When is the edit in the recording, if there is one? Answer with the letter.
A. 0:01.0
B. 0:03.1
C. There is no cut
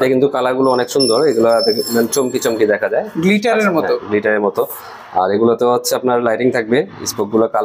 C